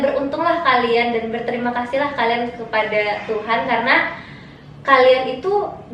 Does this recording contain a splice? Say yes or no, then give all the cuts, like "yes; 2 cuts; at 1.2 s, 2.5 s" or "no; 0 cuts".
no; 0 cuts